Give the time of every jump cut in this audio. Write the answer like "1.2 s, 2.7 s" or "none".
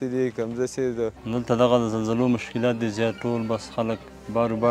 1.2 s